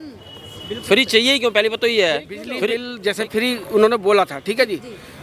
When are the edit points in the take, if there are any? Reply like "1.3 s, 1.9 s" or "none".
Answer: 2.8 s